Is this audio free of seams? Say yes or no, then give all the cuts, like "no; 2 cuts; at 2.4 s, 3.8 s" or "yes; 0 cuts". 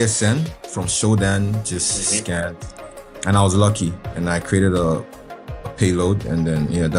yes; 0 cuts